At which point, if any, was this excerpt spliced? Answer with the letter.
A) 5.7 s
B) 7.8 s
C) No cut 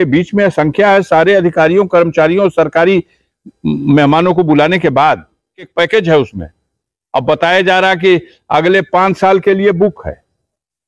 A